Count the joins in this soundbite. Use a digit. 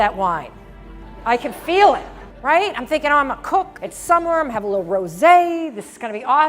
1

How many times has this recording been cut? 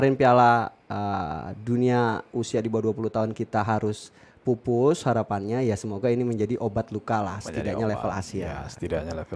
0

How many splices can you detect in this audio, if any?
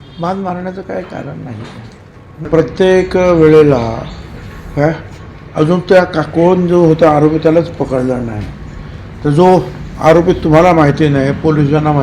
1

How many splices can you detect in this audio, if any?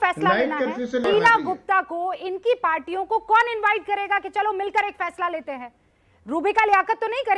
1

